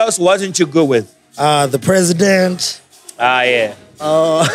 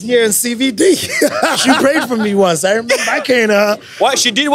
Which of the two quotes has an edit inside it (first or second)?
second